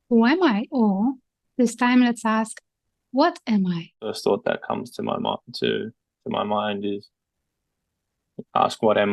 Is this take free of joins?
no; 1 cut; at 4.2 s

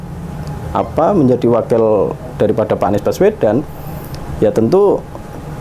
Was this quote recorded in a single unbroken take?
yes; 0 cuts

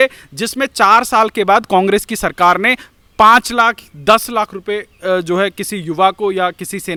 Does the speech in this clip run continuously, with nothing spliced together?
yes; 0 cuts

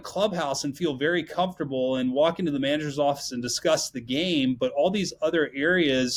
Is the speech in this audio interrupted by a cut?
no; 0 cuts

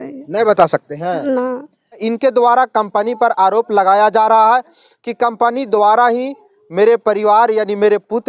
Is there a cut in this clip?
yes; 1 cut; at 2.0 s

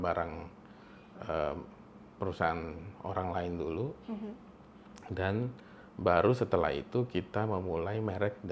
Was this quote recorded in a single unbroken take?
yes; 0 cuts

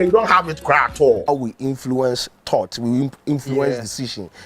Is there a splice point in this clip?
yes; 1 cut; at 1.3 s

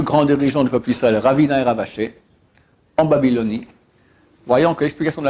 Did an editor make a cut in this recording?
no; 0 cuts

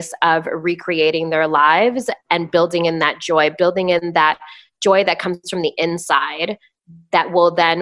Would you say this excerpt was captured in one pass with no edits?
yes; 0 cuts

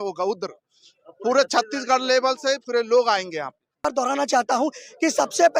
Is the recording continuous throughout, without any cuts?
no; 1 cut; at 3.8 s

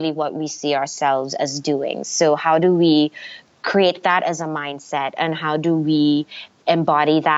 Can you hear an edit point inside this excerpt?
no; 0 cuts

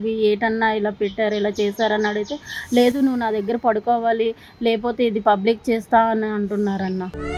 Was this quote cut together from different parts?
no; 0 cuts

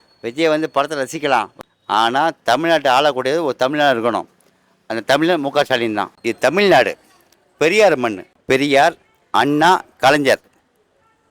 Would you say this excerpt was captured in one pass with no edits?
no; 3 cuts; at 1.6 s, 6.0 s, 8.3 s

